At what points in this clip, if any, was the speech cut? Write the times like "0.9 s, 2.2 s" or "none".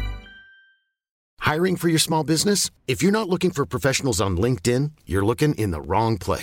1.2 s